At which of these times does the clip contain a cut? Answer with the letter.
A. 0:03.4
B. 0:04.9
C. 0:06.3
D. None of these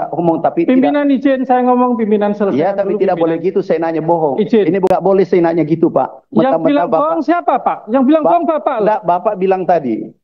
B